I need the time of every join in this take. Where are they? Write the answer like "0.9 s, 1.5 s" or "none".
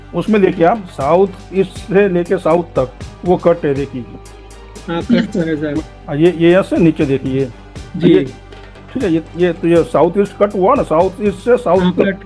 3.1 s, 5.8 s